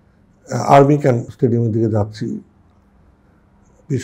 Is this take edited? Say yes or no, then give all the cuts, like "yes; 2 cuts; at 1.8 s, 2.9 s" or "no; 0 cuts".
yes; 1 cut; at 1.3 s